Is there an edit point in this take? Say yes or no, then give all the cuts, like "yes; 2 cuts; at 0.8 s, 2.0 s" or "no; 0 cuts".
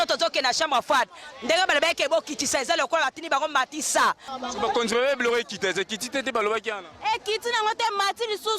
yes; 1 cut; at 4.3 s